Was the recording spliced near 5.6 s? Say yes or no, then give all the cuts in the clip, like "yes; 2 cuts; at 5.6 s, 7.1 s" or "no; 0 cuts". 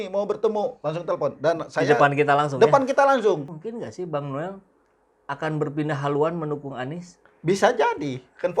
no; 1 cut; at 3.5 s